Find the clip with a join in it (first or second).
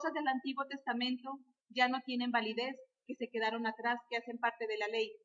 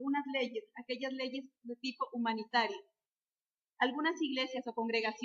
second